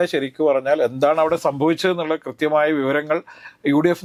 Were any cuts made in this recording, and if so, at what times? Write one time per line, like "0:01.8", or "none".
none